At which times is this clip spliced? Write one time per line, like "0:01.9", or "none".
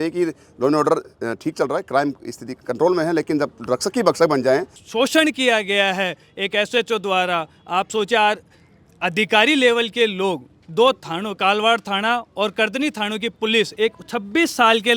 0:04.8